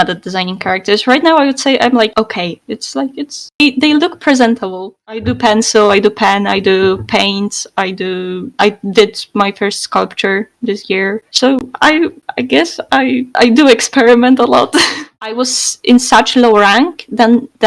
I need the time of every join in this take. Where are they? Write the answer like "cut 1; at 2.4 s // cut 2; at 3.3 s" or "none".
cut 1; at 4.9 s // cut 2; at 15.1 s